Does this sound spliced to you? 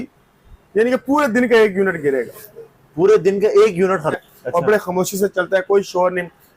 yes; 1 cut; at 4.1 s

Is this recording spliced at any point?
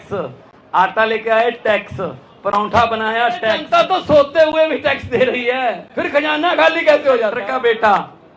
yes; 3 cuts; at 3.6 s, 5.9 s, 7.4 s

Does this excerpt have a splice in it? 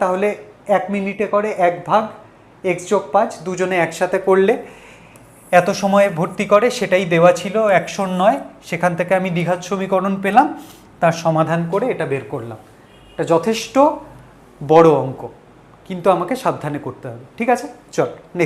no; 0 cuts

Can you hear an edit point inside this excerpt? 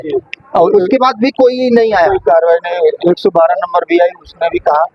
no; 0 cuts

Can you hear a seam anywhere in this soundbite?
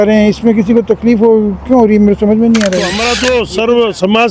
yes; 1 cut; at 3.1 s

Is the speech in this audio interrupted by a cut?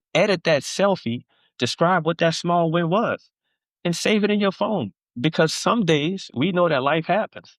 no; 0 cuts

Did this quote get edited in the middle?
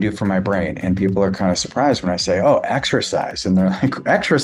no; 0 cuts

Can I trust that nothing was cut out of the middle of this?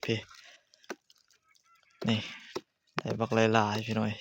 yes; 0 cuts

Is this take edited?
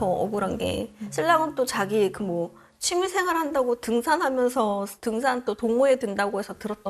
no; 0 cuts

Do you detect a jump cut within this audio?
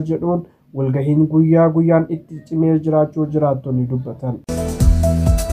yes; 1 cut; at 4.5 s

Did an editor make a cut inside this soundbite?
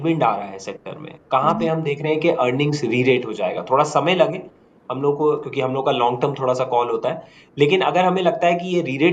no; 0 cuts

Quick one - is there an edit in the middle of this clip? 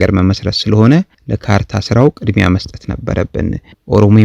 no; 0 cuts

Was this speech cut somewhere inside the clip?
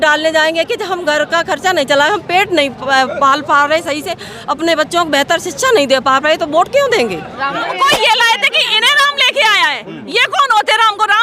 yes; 1 cut; at 7.6 s

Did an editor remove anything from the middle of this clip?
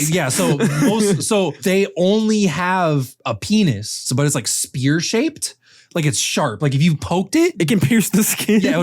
yes; 3 cuts; at 1.6 s, 4.1 s, 7.5 s

